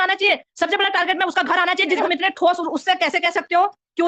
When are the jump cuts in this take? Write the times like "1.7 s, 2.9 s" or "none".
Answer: 2.0 s